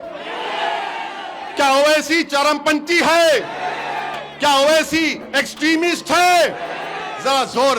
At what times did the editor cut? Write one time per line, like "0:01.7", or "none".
none